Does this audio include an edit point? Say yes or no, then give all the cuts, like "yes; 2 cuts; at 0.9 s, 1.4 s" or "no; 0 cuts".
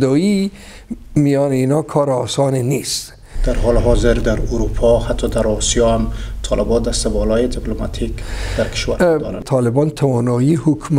yes; 2 cuts; at 3.3 s, 9.4 s